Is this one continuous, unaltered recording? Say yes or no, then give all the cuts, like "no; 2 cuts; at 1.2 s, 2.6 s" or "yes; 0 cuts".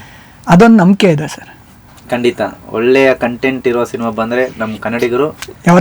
yes; 0 cuts